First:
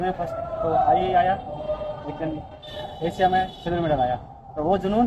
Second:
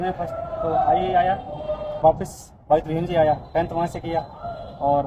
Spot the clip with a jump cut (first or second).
second